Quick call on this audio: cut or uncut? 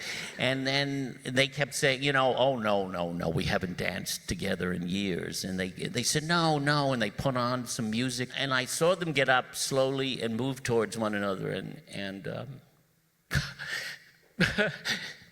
cut